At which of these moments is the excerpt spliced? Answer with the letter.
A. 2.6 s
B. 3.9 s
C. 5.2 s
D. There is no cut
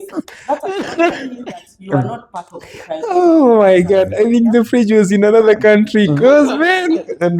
D